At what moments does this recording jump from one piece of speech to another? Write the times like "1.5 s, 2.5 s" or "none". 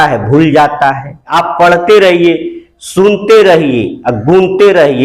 1.3 s